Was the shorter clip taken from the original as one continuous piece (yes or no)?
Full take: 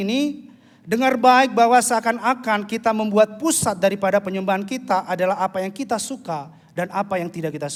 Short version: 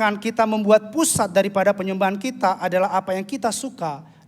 yes